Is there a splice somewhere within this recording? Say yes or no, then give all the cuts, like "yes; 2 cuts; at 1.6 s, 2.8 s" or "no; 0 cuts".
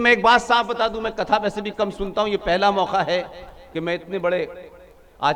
no; 0 cuts